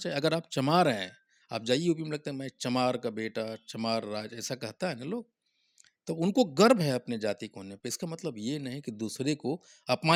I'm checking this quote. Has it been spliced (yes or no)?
no